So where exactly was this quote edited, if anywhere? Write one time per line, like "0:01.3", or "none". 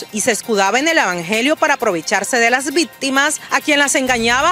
0:03.4